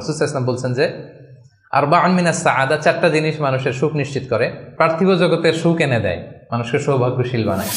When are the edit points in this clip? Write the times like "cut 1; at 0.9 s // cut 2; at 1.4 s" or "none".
cut 1; at 4.6 s